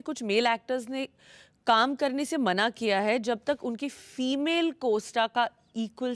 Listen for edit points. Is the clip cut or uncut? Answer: uncut